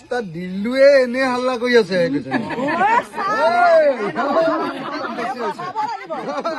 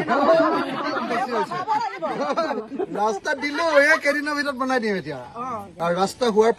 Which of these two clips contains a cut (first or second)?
second